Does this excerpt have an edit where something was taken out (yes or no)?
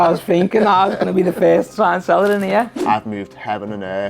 yes